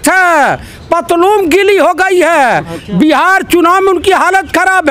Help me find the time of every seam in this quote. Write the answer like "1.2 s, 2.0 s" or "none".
none